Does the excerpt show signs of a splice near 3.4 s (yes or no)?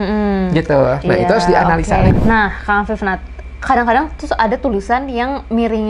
no